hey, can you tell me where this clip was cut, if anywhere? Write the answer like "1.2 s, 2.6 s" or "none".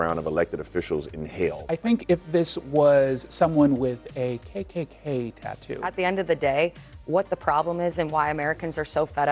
1.7 s, 5.8 s